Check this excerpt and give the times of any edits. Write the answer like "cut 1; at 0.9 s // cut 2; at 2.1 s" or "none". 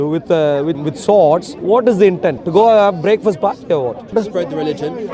cut 1; at 0.8 s // cut 2; at 1.5 s // cut 3; at 2.4 s // cut 4; at 4.1 s